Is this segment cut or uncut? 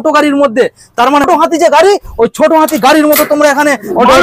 cut